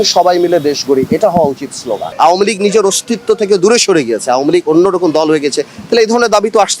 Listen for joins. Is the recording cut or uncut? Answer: cut